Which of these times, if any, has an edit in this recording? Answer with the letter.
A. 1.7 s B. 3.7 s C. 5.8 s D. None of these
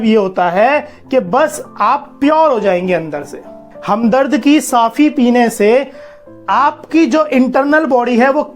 B